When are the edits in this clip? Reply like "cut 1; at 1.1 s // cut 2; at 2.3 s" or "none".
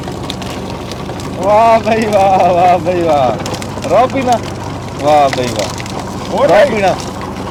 none